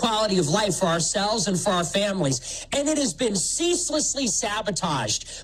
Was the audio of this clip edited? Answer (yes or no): no